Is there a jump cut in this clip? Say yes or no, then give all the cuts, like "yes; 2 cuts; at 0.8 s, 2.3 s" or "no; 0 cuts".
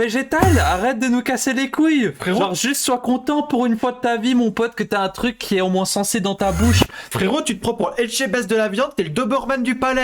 yes; 1 cut; at 7.0 s